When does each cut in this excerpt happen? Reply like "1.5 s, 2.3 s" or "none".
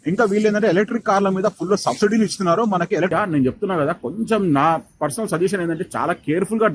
3.1 s

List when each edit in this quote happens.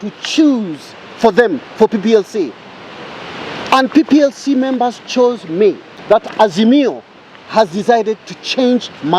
5.9 s

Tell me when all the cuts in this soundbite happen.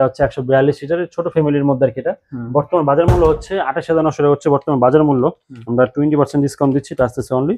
none

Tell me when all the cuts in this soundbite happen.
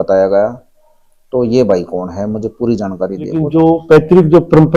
3.4 s

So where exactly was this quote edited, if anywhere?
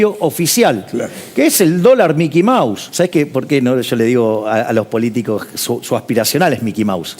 2.8 s

